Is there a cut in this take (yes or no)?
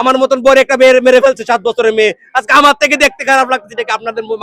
no